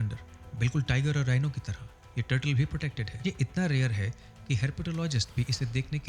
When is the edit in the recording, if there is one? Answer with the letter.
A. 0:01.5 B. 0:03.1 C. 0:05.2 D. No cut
B